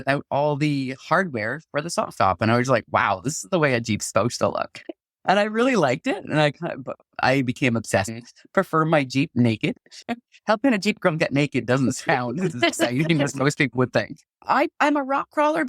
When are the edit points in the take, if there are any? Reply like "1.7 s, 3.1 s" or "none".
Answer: 10.0 s, 14.2 s